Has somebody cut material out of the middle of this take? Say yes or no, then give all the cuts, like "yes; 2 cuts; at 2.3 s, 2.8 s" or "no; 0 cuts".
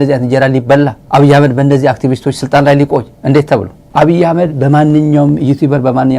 yes; 2 cuts; at 1.0 s, 3.4 s